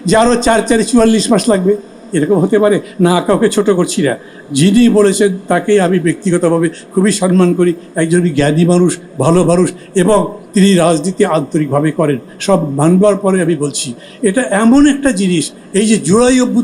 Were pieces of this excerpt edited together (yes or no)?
no